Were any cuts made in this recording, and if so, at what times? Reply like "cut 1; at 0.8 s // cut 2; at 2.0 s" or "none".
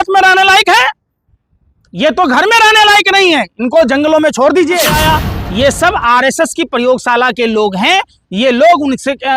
cut 1; at 4.9 s